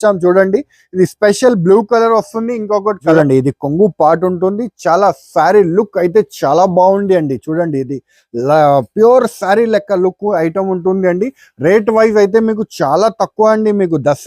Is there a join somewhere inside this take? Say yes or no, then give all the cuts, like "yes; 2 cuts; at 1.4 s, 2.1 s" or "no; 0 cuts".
yes; 1 cut; at 3.1 s